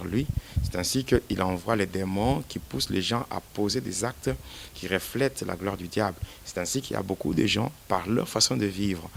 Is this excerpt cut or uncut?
uncut